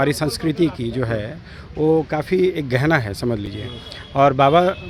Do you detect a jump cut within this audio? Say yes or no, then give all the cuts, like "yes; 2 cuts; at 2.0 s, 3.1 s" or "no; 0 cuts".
no; 0 cuts